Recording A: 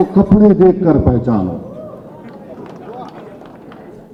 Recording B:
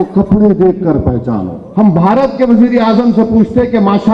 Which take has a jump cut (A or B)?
B